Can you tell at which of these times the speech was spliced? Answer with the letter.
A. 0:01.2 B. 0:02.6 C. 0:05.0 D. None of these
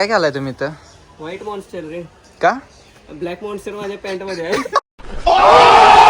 D